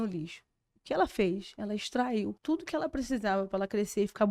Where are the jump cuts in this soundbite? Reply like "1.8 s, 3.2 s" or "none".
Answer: 2.4 s